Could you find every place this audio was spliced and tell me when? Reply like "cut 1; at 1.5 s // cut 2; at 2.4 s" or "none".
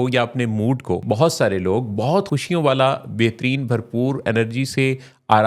cut 1; at 1.0 s // cut 2; at 2.3 s